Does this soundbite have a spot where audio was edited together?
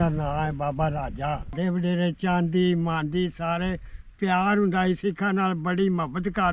yes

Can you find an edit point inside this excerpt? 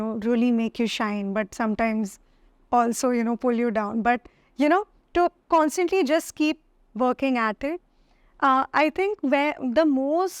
no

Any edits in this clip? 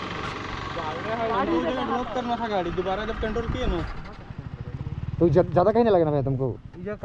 no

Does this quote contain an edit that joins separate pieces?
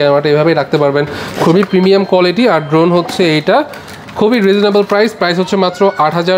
no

